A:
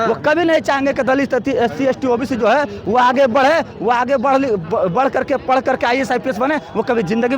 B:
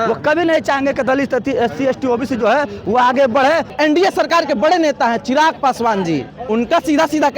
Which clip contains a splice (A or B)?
B